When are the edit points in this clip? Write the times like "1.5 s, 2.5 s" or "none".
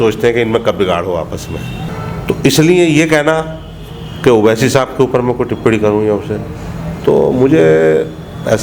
1.8 s